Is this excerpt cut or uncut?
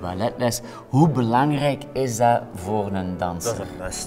uncut